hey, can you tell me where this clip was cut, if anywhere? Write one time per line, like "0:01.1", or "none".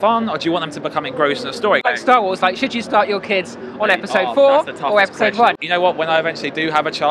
0:01.8
0:05.6